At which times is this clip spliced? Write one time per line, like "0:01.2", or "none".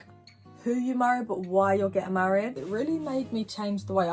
0:02.6